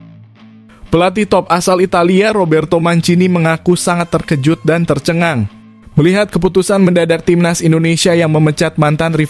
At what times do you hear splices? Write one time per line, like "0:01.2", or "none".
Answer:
0:00.9